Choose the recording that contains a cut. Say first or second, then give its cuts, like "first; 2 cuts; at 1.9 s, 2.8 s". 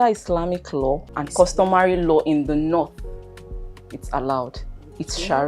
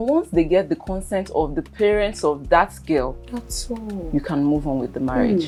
first; 1 cut; at 1.2 s